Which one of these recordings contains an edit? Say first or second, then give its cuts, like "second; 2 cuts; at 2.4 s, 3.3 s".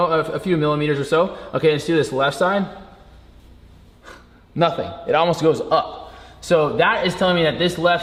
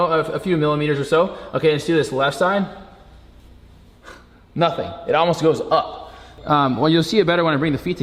second; 1 cut; at 6.3 s